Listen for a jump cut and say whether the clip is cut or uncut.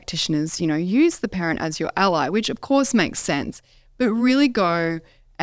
uncut